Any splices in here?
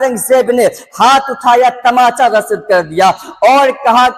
no; 0 cuts

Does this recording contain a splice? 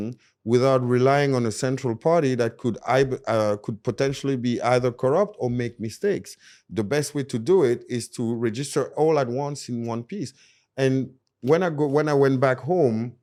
no; 0 cuts

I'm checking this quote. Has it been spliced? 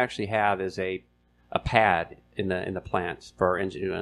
no; 0 cuts

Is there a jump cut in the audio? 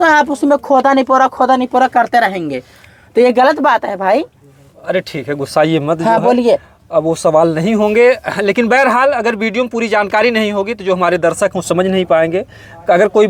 no; 0 cuts

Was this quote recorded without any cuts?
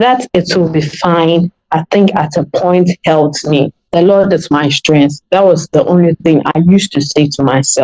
no; 1 cut; at 3.8 s

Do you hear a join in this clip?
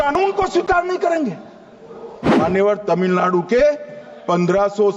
yes; 1 cut; at 2.4 s

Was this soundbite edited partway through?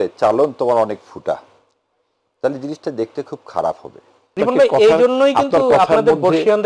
yes; 1 cut; at 4.3 s

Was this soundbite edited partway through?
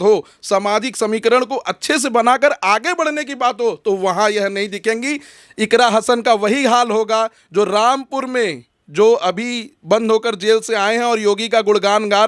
no; 0 cuts

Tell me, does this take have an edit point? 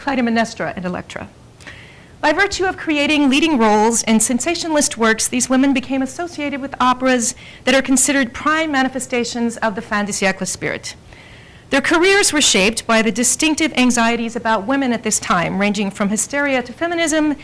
yes; 1 cut; at 16.2 s

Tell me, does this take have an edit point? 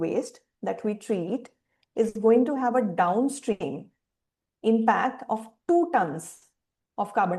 no; 0 cuts

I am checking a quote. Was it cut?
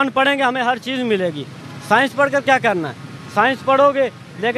no; 0 cuts

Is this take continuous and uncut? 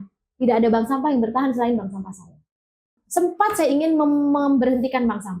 no; 1 cut; at 2.9 s

